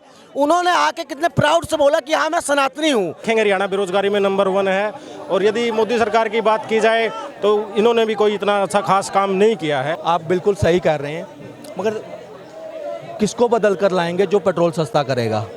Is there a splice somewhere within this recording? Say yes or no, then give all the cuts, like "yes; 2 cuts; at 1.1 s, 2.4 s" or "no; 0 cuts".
yes; 2 cuts; at 3.2 s, 10.0 s